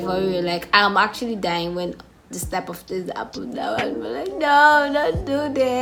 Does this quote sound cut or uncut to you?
uncut